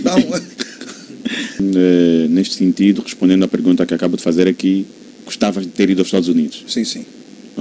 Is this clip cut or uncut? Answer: cut